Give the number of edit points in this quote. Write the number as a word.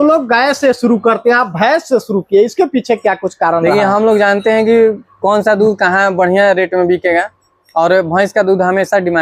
zero